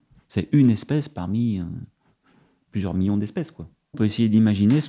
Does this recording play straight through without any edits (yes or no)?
no